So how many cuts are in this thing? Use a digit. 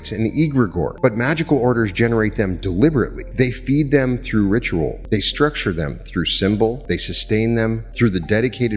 5